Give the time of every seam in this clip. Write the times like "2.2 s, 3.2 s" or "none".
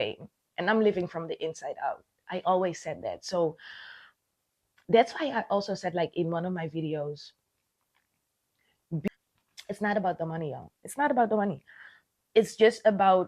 9.0 s